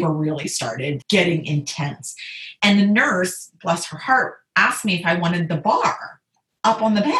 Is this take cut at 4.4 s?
no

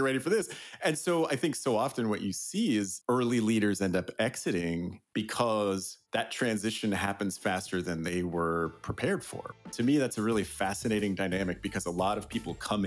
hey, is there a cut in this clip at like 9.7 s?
yes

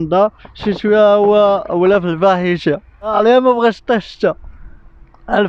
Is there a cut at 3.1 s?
yes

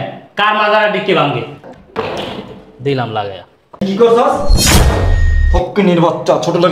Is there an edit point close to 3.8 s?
yes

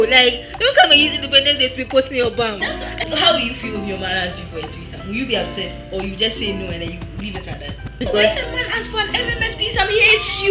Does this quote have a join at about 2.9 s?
yes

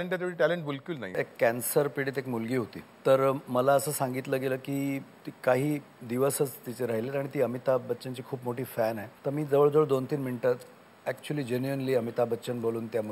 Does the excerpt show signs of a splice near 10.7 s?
no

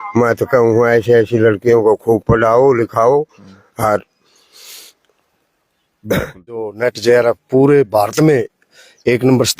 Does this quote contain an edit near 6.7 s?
yes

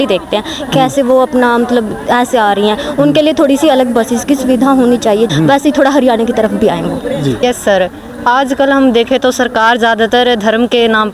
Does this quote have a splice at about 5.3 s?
yes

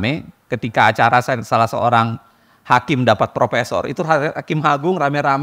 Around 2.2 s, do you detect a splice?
no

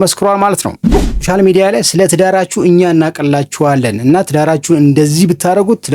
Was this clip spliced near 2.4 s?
no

